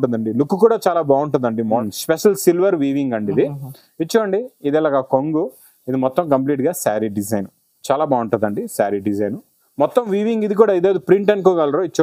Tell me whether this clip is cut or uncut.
cut